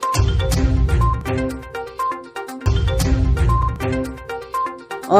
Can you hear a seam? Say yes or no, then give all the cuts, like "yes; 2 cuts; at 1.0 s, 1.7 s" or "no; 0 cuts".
yes; 1 cut; at 2.1 s